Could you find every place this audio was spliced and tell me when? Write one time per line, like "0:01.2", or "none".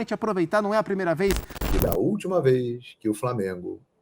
0:01.5